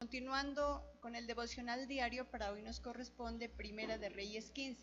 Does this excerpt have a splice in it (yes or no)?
no